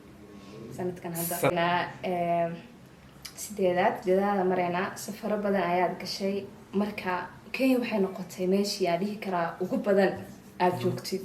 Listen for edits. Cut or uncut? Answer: cut